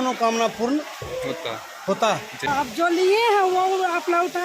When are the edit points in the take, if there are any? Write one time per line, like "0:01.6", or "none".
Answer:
0:02.5